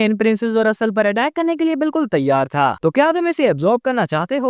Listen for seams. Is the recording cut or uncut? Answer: cut